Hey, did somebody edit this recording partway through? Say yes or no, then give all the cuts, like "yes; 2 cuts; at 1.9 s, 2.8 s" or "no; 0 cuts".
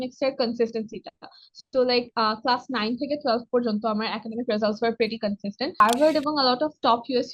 yes; 1 cut; at 5.8 s